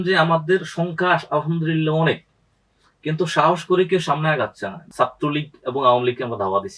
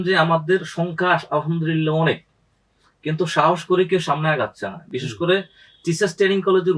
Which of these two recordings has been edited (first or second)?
first